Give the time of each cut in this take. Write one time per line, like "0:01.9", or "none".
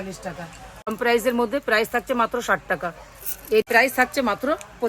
0:00.9
0:03.6

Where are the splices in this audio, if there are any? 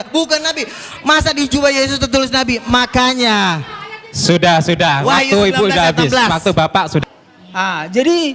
0:07.0

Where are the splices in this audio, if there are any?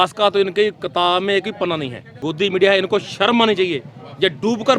0:02.3

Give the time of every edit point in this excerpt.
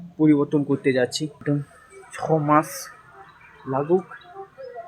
0:01.4

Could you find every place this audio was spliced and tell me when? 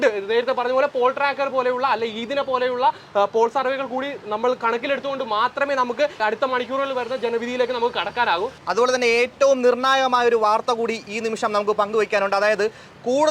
0:06.2
0:08.5

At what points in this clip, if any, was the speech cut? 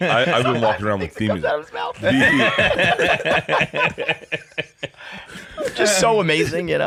none

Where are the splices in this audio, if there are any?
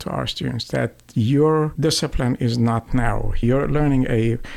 0:01.7
0:03.4

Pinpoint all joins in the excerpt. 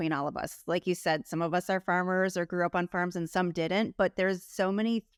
none

